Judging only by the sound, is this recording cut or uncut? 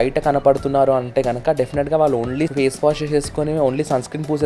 cut